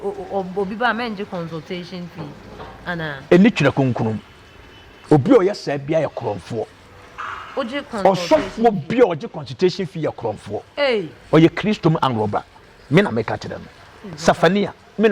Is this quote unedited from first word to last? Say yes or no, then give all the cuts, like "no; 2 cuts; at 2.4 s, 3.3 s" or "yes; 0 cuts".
yes; 0 cuts